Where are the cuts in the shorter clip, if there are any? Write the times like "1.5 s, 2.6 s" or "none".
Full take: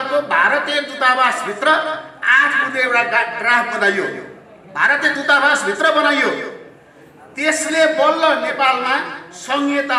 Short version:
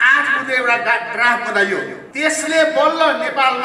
2.0 s